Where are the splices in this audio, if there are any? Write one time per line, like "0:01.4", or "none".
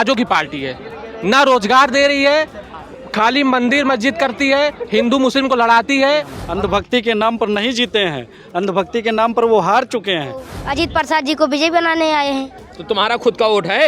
0:06.4
0:10.6